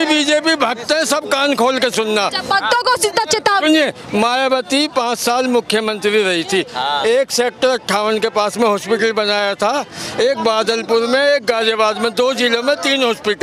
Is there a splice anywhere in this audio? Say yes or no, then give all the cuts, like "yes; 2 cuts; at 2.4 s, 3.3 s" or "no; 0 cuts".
no; 0 cuts